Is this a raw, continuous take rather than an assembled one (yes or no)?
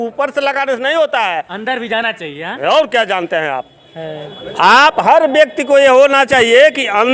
yes